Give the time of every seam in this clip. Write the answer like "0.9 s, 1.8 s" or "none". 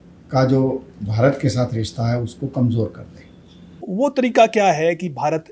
3.8 s